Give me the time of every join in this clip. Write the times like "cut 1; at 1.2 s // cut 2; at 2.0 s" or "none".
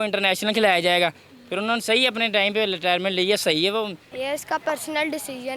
cut 1; at 4.1 s